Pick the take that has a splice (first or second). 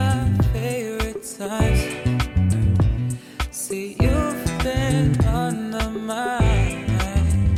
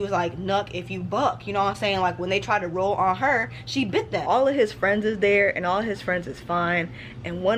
second